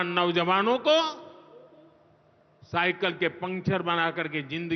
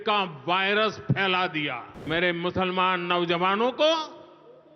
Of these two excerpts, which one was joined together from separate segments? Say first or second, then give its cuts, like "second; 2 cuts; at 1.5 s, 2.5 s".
second; 1 cut; at 1.9 s